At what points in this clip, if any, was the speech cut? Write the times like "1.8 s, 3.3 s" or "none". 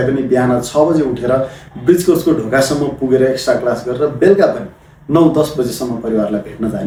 none